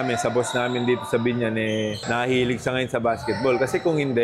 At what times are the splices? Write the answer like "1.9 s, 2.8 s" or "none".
2.0 s